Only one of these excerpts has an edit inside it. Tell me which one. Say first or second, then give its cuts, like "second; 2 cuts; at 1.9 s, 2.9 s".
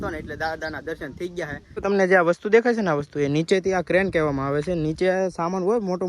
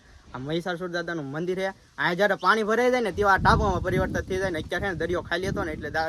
first; 1 cut; at 1.6 s